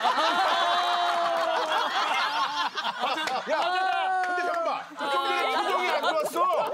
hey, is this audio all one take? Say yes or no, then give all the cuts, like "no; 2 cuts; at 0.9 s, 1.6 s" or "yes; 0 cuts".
no; 1 cut; at 1.0 s